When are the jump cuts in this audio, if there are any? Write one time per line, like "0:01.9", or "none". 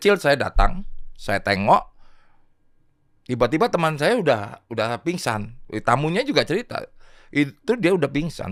none